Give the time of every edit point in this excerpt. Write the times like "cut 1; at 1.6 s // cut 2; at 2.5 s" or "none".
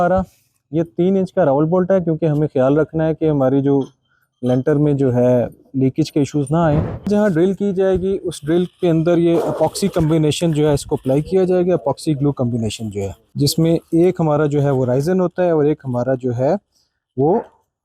cut 1; at 7.0 s // cut 2; at 13.2 s